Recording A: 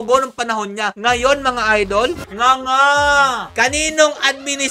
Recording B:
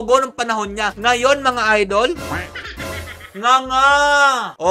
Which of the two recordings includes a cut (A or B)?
A